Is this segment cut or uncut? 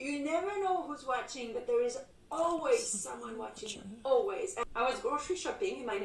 cut